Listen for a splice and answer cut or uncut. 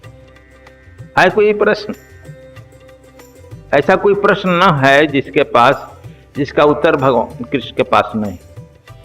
cut